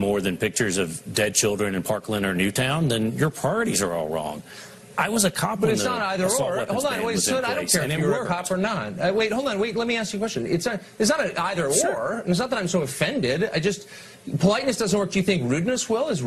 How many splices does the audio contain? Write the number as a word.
one